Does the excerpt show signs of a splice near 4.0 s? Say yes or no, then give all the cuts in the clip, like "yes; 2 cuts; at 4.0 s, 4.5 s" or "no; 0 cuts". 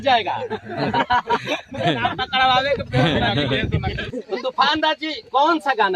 yes; 1 cut; at 4.0 s